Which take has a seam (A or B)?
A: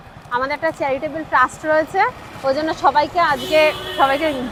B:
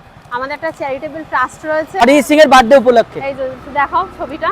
B